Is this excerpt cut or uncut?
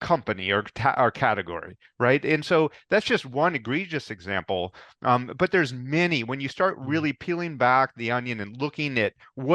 uncut